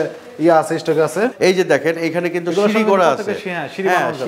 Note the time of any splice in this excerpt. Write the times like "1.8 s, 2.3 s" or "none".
1.3 s